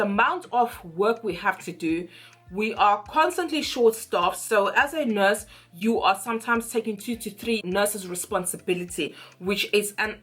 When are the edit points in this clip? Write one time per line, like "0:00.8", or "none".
none